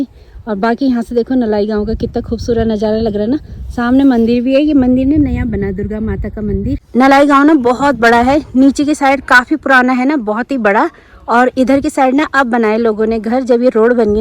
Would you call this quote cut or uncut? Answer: uncut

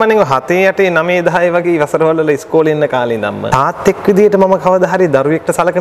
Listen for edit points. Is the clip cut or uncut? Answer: cut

